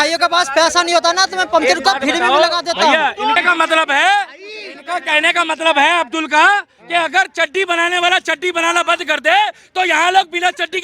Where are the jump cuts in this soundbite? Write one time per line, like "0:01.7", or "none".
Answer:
0:03.4